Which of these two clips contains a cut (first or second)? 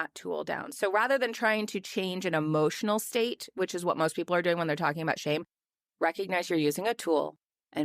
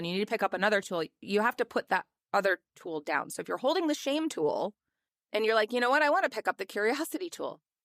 first